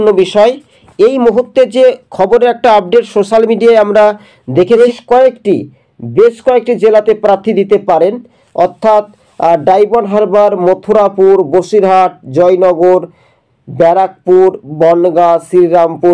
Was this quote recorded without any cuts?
no; 1 cut; at 4.8 s

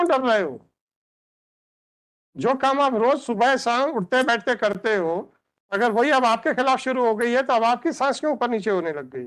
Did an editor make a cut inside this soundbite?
no; 0 cuts

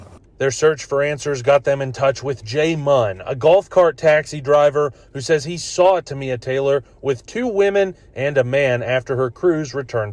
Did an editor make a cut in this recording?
no; 0 cuts

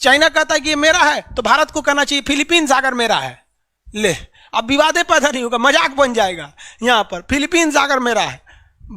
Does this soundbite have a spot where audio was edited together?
no; 0 cuts

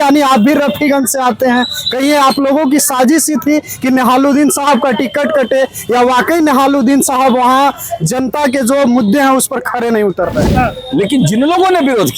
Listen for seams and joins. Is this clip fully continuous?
no; 1 cut; at 10.5 s

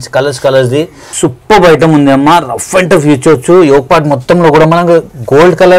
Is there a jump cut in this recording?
yes; 1 cut; at 1.0 s

